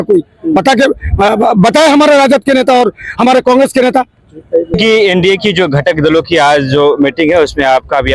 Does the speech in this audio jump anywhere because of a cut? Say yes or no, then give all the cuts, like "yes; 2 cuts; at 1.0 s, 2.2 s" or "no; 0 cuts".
no; 0 cuts